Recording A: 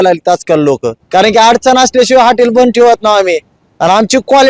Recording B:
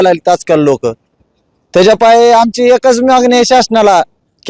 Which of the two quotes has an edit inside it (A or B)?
A